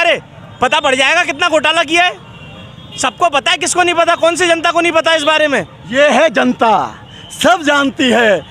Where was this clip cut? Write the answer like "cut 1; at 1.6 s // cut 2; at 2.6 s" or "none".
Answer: none